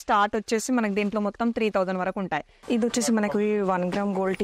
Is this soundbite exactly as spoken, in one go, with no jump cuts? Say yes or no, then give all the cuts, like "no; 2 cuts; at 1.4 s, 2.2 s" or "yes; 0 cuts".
no; 1 cut; at 2.5 s